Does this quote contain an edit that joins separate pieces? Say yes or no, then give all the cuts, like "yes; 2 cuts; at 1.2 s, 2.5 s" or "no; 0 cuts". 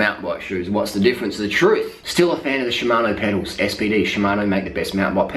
yes; 1 cut; at 2.0 s